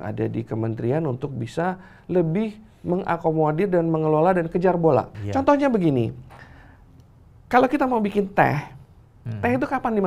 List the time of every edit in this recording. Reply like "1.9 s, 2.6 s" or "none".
5.2 s